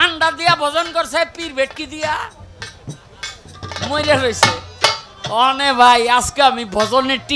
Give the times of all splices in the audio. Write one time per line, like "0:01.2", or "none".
none